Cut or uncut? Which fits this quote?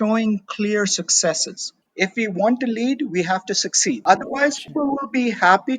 cut